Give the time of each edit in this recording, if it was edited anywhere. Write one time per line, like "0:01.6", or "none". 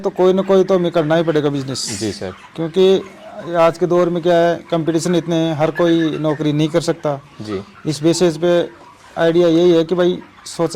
none